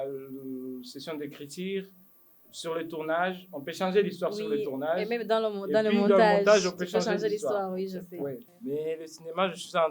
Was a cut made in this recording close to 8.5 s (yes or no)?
yes